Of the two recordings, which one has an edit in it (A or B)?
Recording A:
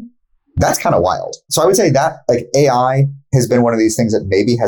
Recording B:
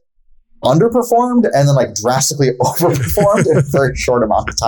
A